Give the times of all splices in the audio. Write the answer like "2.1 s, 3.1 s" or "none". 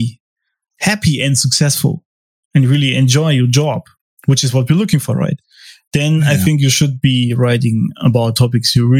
none